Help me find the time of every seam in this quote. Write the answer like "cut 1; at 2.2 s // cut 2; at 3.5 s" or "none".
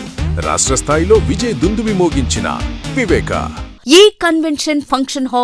cut 1; at 3.7 s